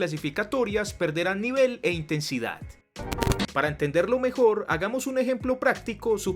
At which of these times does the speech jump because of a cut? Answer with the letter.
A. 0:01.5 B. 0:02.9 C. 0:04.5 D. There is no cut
B